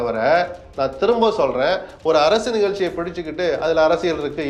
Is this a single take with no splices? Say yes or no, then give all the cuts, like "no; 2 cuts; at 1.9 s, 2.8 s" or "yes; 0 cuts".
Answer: yes; 0 cuts